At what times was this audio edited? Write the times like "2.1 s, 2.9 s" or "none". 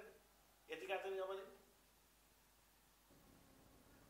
3.1 s